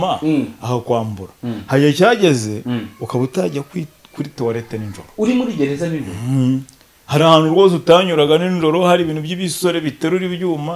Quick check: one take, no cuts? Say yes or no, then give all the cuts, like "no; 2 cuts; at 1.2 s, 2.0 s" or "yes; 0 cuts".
yes; 0 cuts